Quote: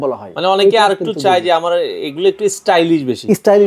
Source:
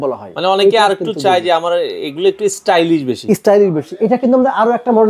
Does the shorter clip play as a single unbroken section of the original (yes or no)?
yes